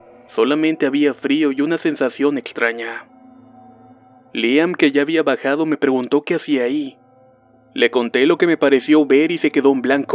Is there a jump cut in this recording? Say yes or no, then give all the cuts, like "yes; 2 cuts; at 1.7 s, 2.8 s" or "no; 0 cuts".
no; 0 cuts